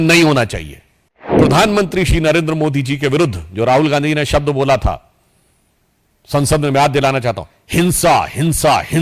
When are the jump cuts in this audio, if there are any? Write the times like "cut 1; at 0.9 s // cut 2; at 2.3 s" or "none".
cut 1; at 1.3 s